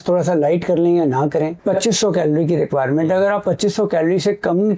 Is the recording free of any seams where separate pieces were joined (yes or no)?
no